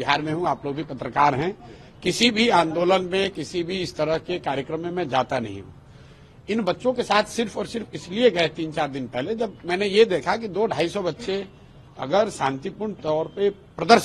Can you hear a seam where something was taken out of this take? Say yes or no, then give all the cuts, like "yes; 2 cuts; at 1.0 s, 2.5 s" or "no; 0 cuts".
no; 0 cuts